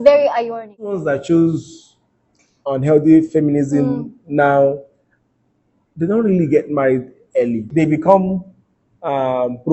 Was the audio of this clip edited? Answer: yes; 2 cuts; at 1.0 s, 7.7 s

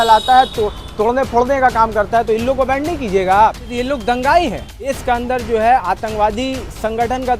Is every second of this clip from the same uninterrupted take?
no; 2 cuts; at 3.7 s, 5.0 s

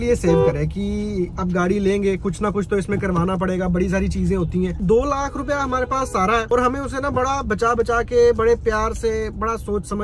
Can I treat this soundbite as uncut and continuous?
yes; 0 cuts

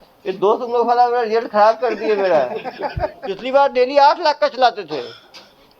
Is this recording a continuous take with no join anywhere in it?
no; 1 cut; at 3.4 s

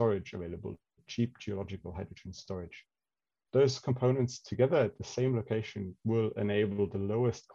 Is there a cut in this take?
no; 0 cuts

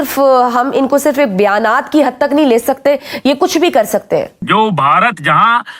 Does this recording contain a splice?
yes; 1 cut; at 4.4 s

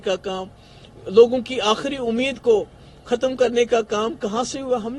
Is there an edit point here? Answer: no; 0 cuts

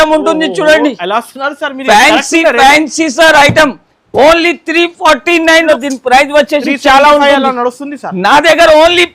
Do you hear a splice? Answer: yes; 1 cut; at 5.6 s

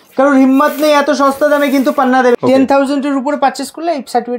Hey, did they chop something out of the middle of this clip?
yes; 1 cut; at 2.3 s

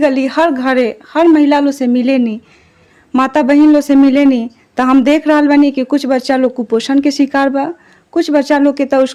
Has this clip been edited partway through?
no; 0 cuts

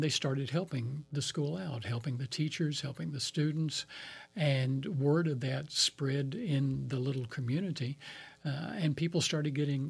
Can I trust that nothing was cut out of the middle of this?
yes; 0 cuts

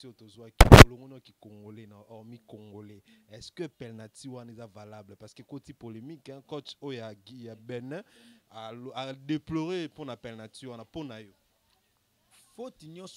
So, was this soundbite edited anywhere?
no; 0 cuts

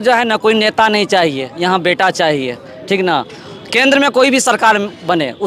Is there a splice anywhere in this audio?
no; 0 cuts

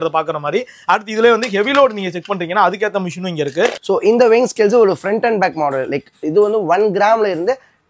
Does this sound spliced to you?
yes; 1 cut; at 3.8 s

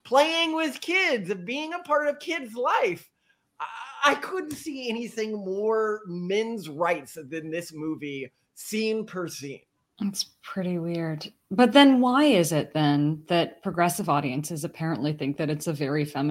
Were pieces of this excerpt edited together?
no; 0 cuts

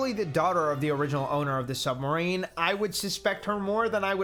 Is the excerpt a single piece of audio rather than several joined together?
yes; 0 cuts

